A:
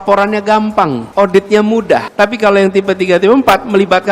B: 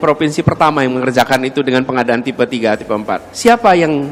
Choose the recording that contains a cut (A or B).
A